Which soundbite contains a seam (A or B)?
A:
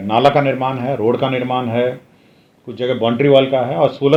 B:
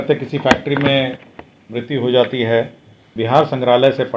B